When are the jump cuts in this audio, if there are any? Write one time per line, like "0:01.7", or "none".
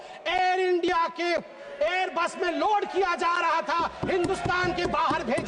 none